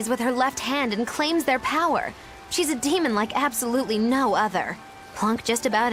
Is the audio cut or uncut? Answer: uncut